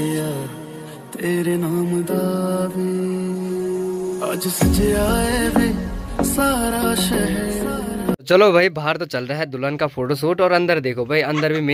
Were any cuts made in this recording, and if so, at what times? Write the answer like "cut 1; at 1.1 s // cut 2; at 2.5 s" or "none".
none